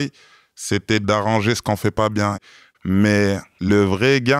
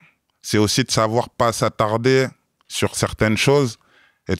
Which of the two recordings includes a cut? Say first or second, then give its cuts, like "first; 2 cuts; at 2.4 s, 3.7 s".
first; 3 cuts; at 1.0 s, 2.4 s, 3.7 s